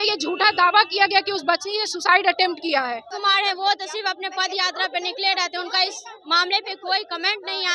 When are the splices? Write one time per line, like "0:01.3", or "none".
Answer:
0:03.1